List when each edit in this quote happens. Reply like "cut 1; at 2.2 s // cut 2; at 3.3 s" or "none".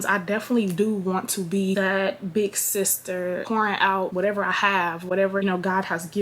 none